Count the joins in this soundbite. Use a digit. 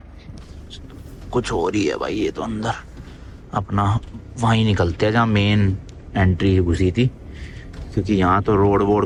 0